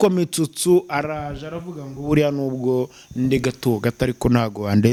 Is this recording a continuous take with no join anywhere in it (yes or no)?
yes